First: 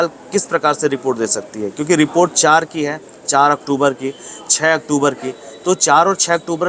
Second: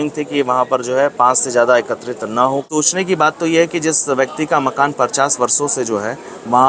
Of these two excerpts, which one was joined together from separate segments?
second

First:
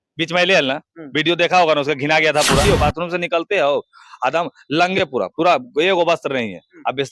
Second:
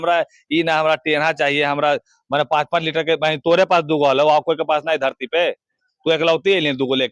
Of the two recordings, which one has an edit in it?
first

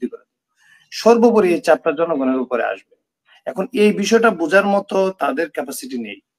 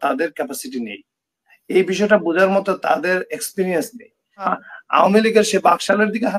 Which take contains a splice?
second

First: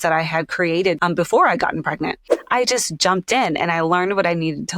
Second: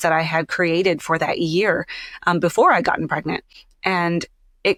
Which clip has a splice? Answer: first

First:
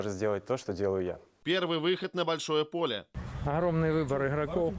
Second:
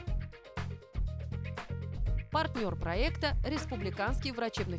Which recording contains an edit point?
first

